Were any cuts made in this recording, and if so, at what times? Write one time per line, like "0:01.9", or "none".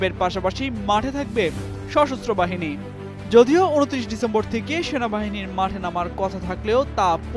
none